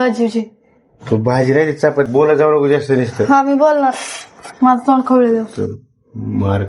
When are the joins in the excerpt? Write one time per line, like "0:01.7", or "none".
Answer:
0:02.1